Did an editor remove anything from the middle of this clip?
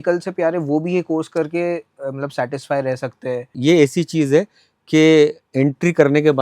yes; 1 cut; at 3.5 s

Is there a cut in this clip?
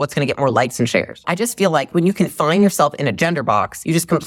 yes; 1 cut; at 1.3 s

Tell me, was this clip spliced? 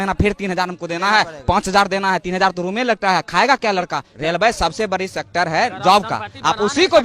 yes; 1 cut; at 4.1 s

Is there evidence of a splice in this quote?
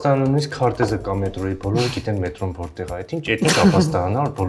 no; 0 cuts

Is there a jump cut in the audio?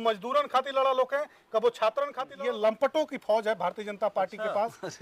yes; 1 cut; at 2.2 s

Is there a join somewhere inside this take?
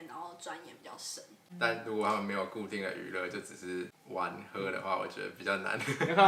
yes; 2 cuts; at 1.5 s, 4.0 s

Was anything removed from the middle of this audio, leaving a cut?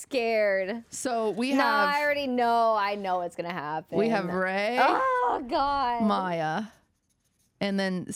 no; 0 cuts

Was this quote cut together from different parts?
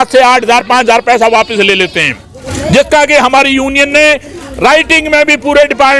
no; 0 cuts

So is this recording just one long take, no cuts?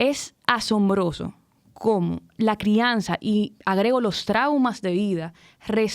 no; 1 cut; at 2.3 s

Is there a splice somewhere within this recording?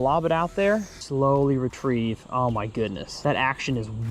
yes; 2 cuts; at 1.0 s, 3.1 s

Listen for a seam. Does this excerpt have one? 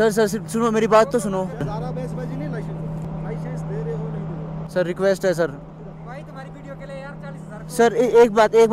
yes; 1 cut; at 1.7 s

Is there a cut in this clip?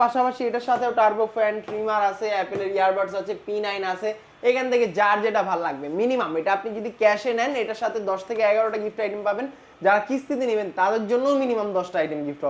no; 0 cuts

